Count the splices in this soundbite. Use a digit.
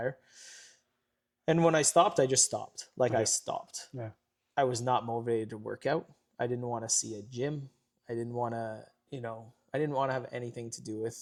0